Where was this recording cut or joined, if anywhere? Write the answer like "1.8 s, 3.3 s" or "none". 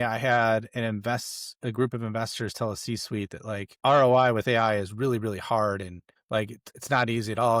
3.7 s